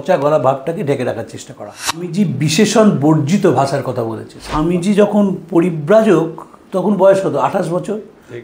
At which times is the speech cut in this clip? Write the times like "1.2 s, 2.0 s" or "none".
2.2 s, 4.7 s